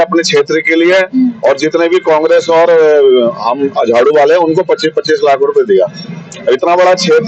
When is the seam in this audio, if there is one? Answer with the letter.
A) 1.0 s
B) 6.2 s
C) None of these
C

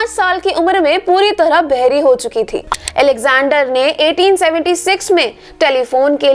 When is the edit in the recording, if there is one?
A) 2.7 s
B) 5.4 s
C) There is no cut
A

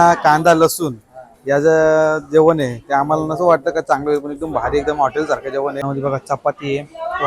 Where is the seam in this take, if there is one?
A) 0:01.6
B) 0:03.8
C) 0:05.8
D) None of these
C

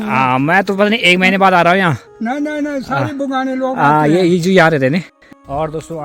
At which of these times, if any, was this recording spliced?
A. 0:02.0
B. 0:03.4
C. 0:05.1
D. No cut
C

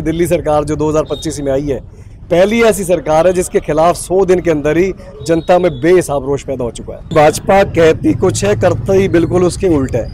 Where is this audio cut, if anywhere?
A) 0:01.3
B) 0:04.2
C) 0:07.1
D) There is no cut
C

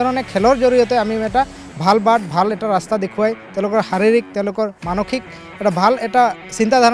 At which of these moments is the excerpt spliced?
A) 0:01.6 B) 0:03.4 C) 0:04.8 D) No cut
D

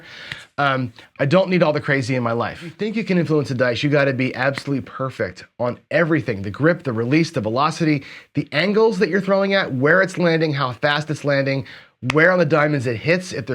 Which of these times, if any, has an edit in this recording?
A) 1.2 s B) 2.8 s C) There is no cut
B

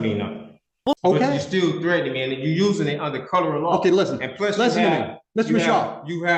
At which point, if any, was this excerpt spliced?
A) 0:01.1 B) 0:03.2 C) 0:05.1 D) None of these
D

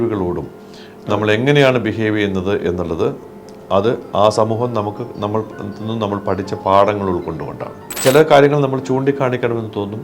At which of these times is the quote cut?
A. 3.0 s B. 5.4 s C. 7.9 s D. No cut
C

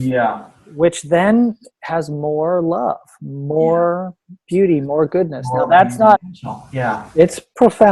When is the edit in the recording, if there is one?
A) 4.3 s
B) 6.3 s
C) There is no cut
B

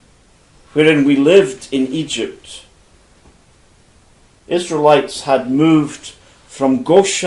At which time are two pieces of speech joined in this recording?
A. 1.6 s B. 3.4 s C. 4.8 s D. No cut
A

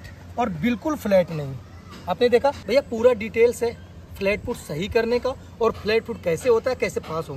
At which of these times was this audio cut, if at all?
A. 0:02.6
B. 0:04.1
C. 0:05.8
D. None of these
A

